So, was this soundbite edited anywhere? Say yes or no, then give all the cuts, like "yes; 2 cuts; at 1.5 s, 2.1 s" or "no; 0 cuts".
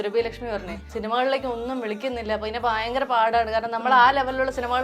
yes; 1 cut; at 0.9 s